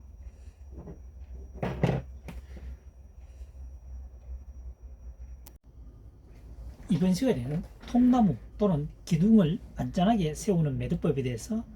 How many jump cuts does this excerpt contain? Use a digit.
1